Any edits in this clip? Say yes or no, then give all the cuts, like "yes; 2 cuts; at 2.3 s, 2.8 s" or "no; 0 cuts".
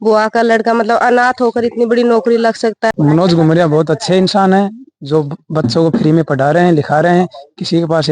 yes; 1 cut; at 2.9 s